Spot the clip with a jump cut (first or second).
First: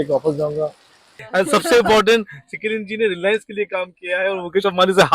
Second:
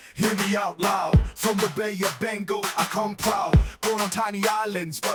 first